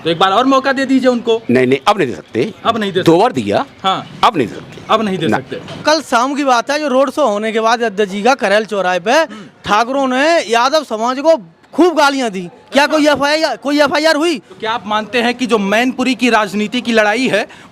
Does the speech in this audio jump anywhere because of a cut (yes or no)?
yes